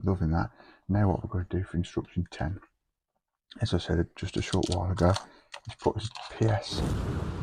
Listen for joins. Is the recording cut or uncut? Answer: uncut